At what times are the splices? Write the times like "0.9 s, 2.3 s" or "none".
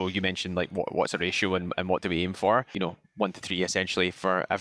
none